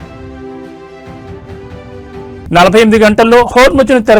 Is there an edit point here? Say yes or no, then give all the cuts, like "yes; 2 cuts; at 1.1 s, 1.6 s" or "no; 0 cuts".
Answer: no; 0 cuts